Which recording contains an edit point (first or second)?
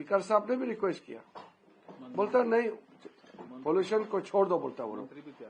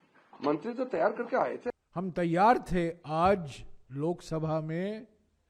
second